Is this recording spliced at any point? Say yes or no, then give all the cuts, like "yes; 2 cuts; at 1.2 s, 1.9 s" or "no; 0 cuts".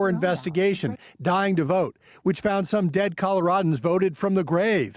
yes; 1 cut; at 3.7 s